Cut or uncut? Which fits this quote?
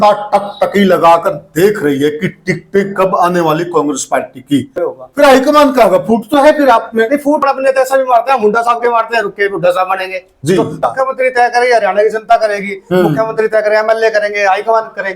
cut